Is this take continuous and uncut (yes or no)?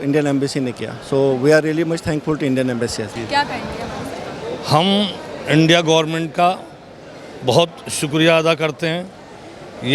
no